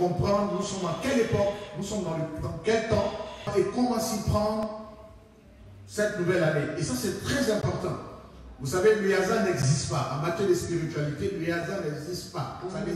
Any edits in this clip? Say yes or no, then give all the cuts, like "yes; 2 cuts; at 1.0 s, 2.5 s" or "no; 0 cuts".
yes; 1 cut; at 3.5 s